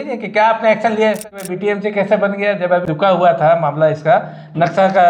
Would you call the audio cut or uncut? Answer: cut